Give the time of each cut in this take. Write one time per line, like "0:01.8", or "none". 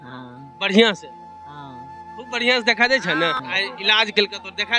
0:03.4